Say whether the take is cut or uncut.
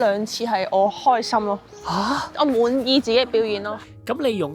cut